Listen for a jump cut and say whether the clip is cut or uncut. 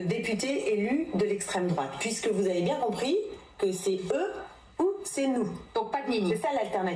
cut